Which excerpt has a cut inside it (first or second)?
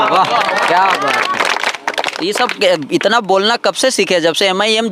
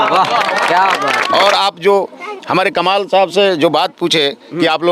second